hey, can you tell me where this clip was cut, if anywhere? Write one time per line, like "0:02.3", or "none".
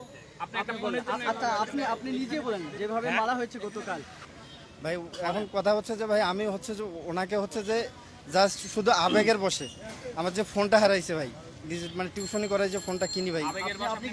0:04.2